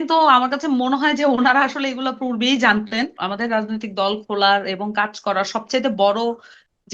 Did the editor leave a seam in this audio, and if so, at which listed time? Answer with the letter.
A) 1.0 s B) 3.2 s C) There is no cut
B